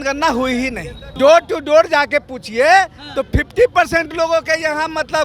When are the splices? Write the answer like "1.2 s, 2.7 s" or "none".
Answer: 1.0 s